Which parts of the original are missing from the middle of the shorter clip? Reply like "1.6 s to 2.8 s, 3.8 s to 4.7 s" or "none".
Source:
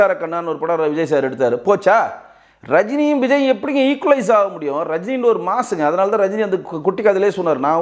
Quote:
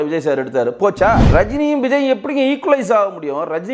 2.1 s to 2.6 s